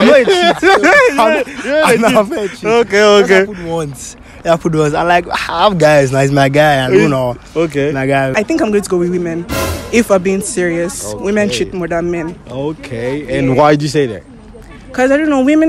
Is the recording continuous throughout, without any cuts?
no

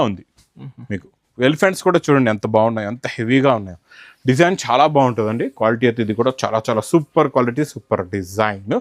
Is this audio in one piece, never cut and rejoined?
yes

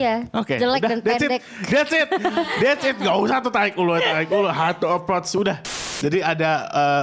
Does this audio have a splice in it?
yes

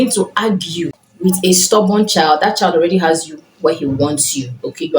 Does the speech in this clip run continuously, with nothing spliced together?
no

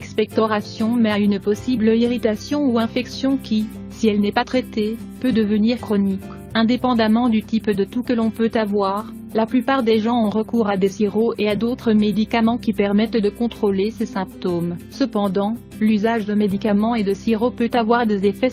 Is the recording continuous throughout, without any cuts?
no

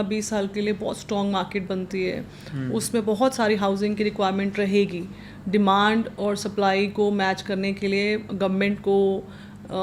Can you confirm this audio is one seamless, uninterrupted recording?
yes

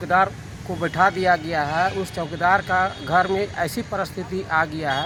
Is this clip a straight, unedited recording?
yes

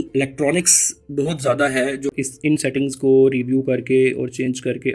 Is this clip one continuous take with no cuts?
no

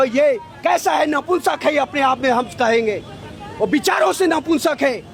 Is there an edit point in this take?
no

